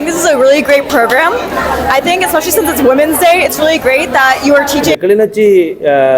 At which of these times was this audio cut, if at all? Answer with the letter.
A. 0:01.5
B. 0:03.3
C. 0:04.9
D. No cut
C